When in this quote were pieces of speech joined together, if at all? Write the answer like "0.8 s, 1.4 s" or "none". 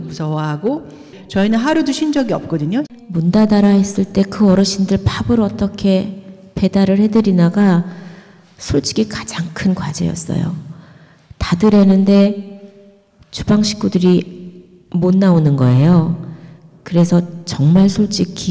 1.1 s, 2.9 s